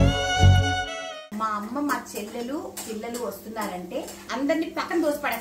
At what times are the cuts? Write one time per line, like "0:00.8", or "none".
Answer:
0:01.0
0:04.2

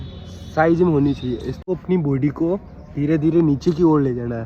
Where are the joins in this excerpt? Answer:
0:01.6

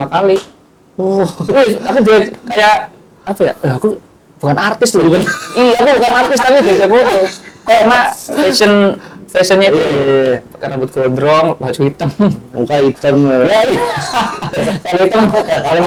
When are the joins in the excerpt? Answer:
none

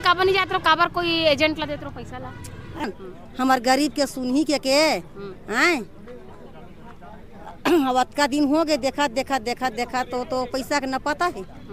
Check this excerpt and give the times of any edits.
0:02.8

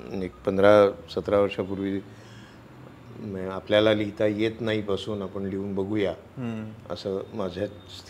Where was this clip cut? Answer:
none

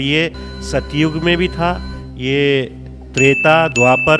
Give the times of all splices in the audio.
none

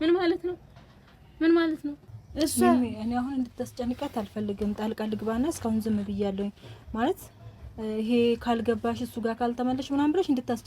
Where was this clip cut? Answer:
0:02.0

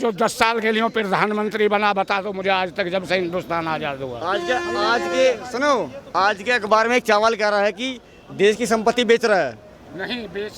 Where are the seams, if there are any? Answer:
none

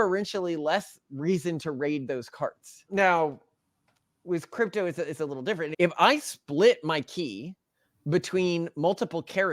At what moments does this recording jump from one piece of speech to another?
0:02.7
0:05.7

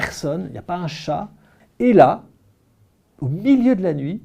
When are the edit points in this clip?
0:01.6

